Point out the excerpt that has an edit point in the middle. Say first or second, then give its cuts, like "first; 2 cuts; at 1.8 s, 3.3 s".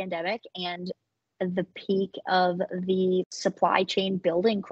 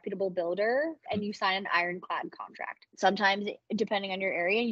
second; 2 cuts; at 1.1 s, 2.8 s